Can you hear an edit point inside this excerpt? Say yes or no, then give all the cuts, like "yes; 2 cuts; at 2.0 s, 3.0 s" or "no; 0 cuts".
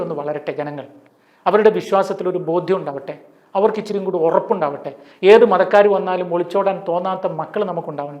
no; 0 cuts